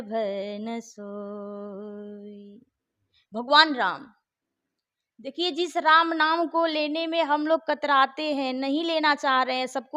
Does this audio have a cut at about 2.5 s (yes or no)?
no